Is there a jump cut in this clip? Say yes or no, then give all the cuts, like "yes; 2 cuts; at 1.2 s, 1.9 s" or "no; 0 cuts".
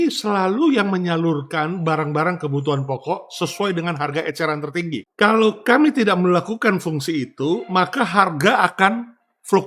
yes; 1 cut; at 5.0 s